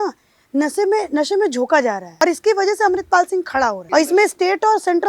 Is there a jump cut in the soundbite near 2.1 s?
yes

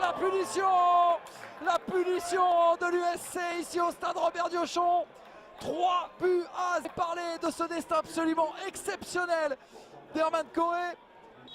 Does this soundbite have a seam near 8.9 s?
no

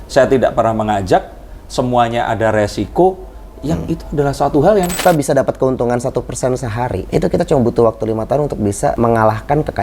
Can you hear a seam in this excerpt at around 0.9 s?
no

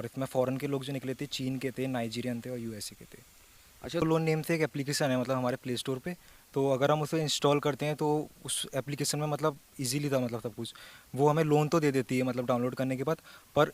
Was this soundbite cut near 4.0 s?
yes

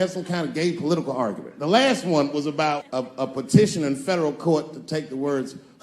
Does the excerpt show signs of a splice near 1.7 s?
no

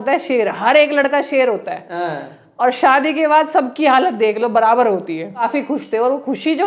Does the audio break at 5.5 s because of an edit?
yes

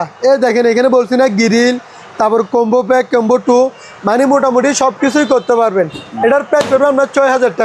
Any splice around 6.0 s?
yes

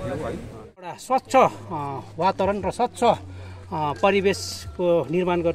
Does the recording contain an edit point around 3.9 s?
no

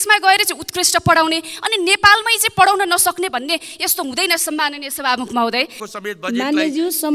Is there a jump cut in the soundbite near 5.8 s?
yes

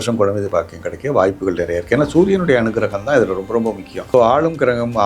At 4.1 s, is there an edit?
yes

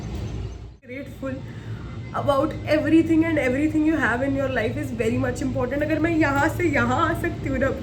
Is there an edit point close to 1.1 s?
yes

